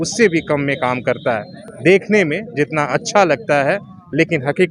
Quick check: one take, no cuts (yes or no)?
yes